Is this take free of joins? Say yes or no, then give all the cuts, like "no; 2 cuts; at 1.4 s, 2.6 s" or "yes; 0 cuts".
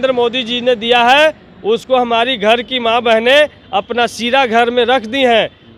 yes; 0 cuts